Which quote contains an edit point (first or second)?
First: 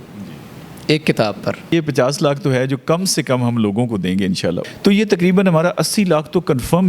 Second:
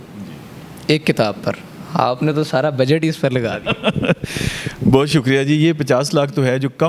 first